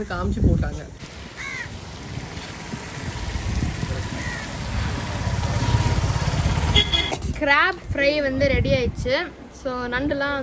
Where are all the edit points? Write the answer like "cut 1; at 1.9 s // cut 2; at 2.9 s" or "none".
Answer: cut 1; at 1.0 s // cut 2; at 7.1 s

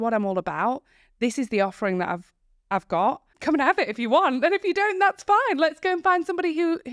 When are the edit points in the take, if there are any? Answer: none

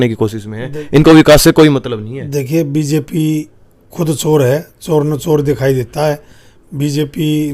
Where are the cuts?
none

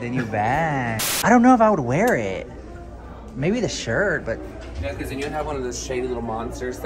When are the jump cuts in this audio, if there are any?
cut 1; at 1.1 s

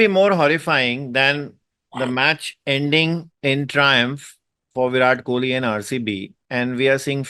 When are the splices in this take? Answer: cut 1; at 3.3 s // cut 2; at 6.3 s

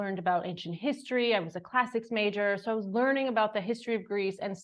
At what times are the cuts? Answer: none

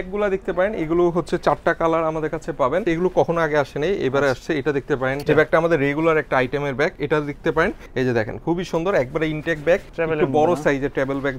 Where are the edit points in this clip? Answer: cut 1; at 2.8 s // cut 2; at 5.2 s // cut 3; at 7.8 s // cut 4; at 9.9 s

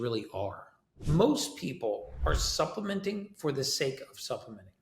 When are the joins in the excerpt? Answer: cut 1; at 0.9 s

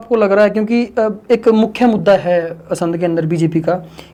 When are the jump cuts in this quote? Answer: none

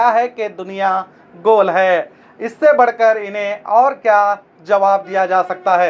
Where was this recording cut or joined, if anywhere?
none

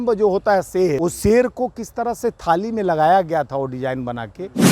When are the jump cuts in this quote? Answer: cut 1; at 1.0 s

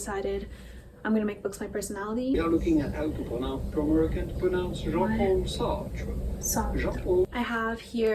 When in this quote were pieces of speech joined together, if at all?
cut 1; at 2.3 s // cut 2; at 7.3 s

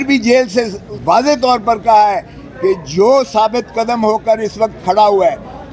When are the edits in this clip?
cut 1; at 0.9 s

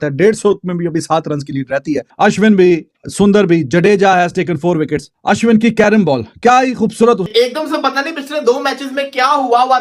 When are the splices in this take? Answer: cut 1; at 2.1 s // cut 2; at 7.2 s

